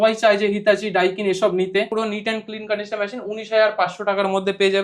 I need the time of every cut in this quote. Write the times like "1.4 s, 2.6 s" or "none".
1.9 s